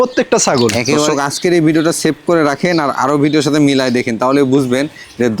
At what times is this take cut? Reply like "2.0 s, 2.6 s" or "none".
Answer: 1.1 s